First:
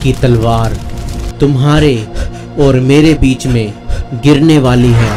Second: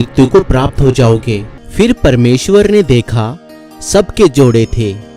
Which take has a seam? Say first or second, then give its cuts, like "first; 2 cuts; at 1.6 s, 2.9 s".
second; 1 cut; at 1.6 s